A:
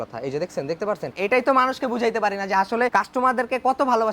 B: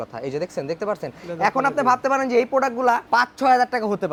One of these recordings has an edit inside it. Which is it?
A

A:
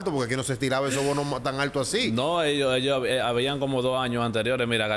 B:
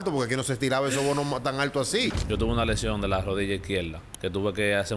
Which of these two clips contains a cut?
B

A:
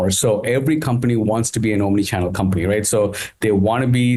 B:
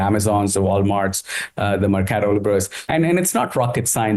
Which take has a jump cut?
B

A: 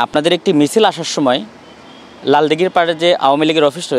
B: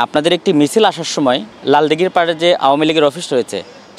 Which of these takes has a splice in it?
B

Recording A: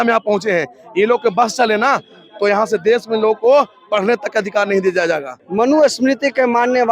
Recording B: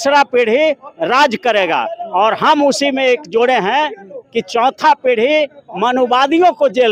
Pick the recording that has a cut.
A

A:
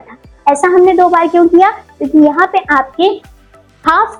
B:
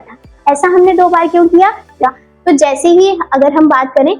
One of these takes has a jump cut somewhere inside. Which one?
B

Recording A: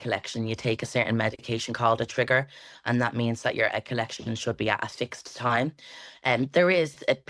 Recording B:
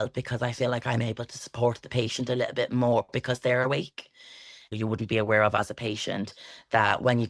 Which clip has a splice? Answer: B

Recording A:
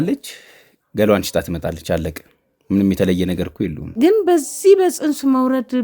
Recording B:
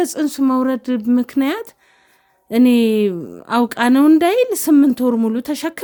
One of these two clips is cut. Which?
A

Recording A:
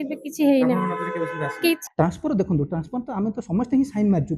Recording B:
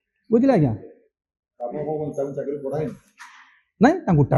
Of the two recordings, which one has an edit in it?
A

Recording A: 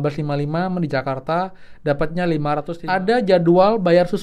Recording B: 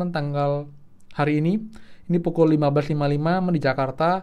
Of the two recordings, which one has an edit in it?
A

